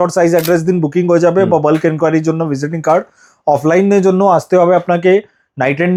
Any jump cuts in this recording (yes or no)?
no